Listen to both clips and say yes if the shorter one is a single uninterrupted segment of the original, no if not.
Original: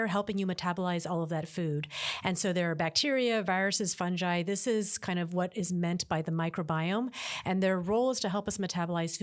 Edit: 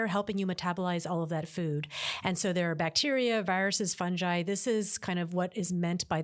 yes